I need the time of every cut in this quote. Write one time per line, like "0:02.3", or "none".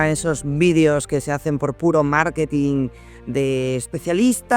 none